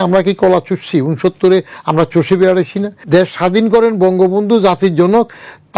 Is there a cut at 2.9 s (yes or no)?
yes